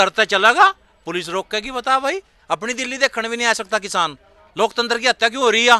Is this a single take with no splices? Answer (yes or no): yes